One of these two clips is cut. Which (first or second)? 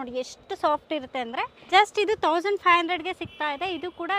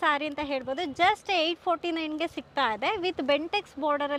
first